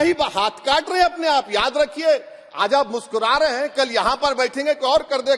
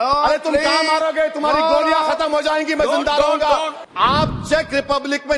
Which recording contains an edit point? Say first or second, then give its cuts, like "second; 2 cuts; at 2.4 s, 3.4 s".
second; 1 cut; at 3.8 s